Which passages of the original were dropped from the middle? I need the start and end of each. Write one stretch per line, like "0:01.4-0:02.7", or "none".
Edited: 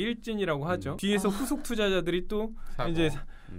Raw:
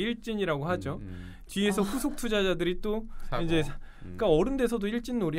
0:00.9-0:01.4